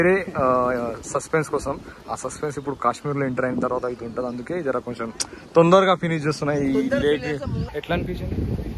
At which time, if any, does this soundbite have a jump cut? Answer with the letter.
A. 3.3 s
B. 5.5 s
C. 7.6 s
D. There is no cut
C